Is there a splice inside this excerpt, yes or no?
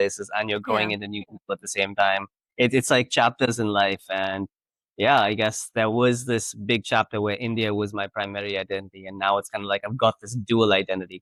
no